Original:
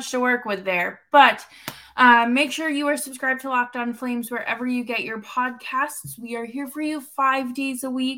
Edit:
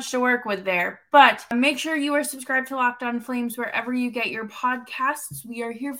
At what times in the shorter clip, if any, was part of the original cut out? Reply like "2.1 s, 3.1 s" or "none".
1.5 s